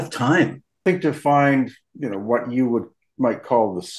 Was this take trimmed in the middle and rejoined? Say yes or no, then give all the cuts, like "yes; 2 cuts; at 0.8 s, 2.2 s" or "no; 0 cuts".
yes; 2 cuts; at 0.8 s, 1.8 s